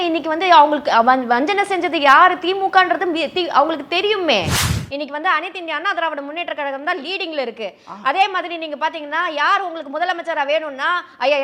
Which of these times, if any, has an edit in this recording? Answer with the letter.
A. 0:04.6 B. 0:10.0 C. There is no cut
A